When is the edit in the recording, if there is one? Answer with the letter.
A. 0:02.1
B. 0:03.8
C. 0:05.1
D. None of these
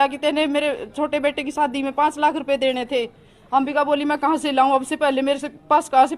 D